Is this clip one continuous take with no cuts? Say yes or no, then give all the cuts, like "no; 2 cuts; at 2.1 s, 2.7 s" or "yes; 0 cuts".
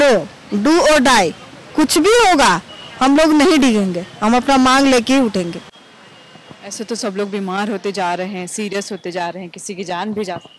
yes; 0 cuts